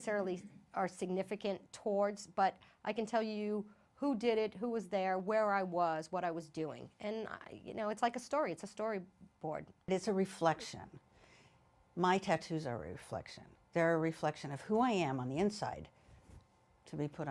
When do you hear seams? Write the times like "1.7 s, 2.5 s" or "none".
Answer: 7.2 s